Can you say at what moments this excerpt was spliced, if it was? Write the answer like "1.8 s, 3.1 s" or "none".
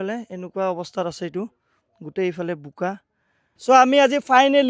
3.5 s